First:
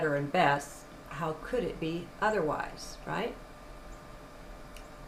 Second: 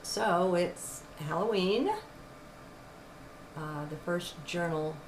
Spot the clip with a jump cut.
second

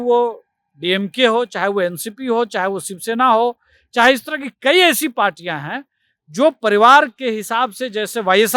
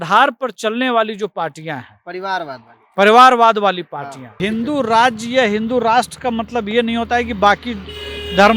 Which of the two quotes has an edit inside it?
second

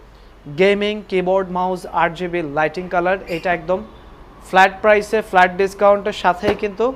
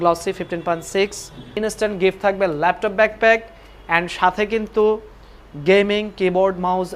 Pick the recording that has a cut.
second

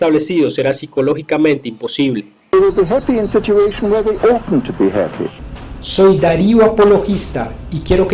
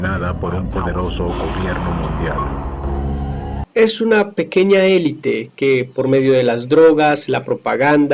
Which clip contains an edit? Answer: second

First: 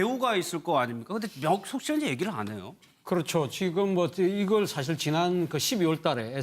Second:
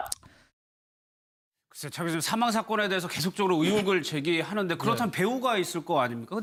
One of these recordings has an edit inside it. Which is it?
first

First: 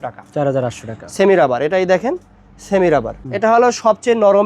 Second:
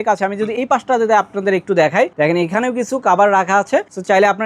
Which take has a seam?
first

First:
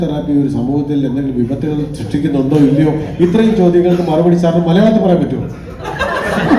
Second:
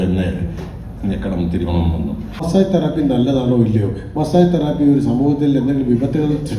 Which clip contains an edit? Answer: second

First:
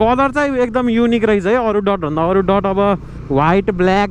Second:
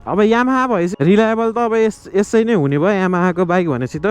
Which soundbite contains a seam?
second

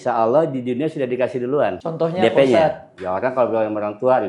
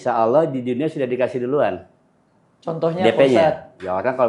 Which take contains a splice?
first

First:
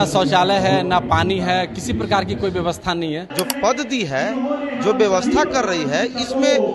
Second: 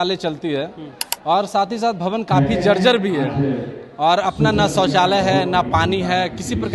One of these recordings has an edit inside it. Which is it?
first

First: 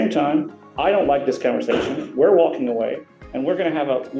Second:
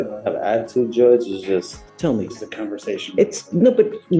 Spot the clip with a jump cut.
second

